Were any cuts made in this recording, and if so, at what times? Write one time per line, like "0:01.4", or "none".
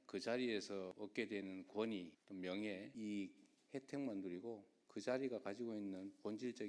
0:00.9
0:02.2
0:02.9
0:04.7